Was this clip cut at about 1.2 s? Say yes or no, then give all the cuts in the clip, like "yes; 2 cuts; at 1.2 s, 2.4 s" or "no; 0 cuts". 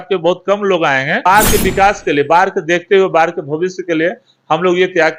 yes; 1 cut; at 1.2 s